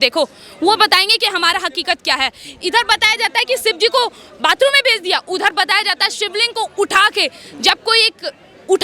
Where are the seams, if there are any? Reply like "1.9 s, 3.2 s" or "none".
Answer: none

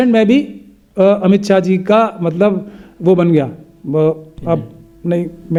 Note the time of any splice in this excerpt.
none

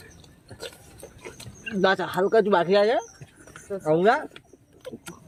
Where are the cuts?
none

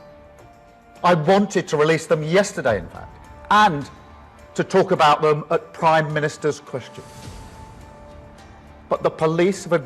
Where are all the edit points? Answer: 7.4 s, 8.8 s

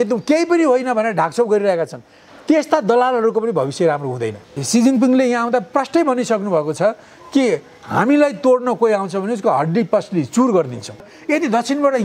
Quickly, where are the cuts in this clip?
4.4 s, 11.1 s

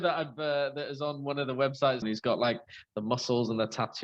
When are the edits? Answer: 2.0 s

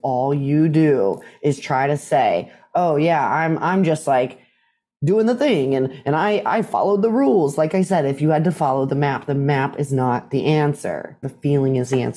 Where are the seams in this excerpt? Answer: 11.2 s

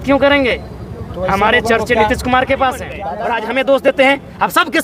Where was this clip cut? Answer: 3.0 s

